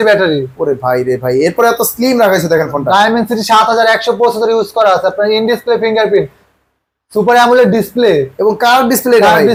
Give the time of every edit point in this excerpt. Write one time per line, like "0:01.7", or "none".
none